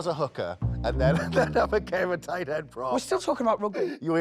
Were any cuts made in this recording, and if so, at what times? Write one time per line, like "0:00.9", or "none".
none